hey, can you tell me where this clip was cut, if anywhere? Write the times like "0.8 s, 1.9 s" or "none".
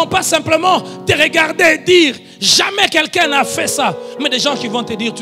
none